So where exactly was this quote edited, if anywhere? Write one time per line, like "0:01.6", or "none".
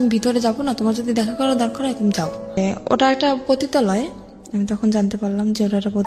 0:02.6